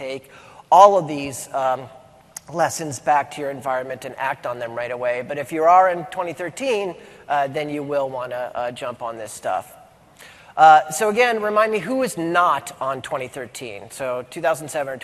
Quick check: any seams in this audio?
no; 0 cuts

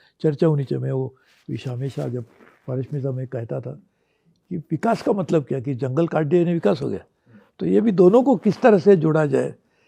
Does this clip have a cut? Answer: no; 0 cuts

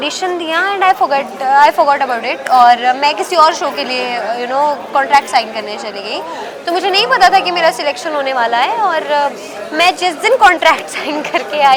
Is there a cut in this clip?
no; 0 cuts

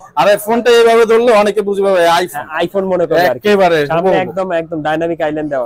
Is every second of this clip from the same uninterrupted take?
yes; 0 cuts

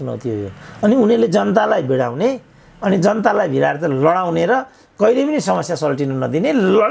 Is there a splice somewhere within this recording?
no; 0 cuts

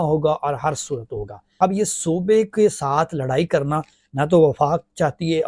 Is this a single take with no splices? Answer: no; 1 cut; at 1.4 s

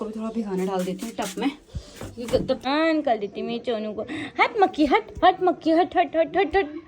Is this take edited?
yes; 1 cut; at 2.6 s

